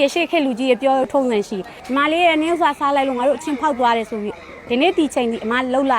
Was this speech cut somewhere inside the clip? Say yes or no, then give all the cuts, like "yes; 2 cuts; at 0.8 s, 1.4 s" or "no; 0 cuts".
yes; 1 cut; at 1.7 s